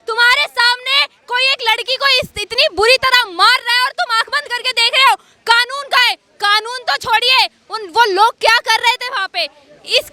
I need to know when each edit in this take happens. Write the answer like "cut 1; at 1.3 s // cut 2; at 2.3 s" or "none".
none